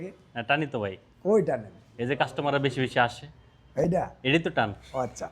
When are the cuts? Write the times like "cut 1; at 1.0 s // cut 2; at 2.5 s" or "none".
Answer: none